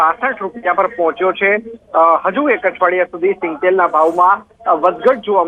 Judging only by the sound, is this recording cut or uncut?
cut